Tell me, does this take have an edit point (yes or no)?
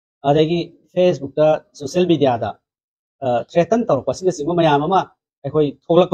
no